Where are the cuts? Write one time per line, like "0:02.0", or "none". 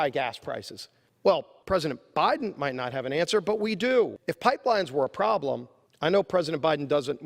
0:04.2